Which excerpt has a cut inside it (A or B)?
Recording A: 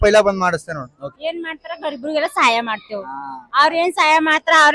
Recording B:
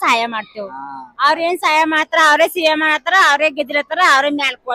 A